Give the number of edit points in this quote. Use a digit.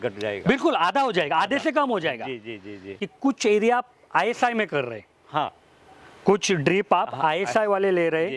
1